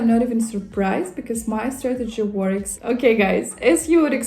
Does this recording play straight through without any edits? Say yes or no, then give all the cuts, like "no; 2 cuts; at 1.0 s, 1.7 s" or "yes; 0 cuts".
no; 1 cut; at 2.7 s